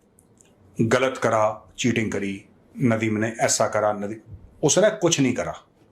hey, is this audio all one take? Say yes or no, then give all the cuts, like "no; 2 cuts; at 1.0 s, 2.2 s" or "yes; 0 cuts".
yes; 0 cuts